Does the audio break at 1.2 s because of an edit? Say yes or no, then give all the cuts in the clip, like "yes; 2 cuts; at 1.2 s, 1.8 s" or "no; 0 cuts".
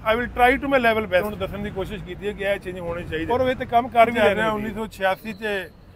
yes; 3 cuts; at 1.2 s, 3.3 s, 4.1 s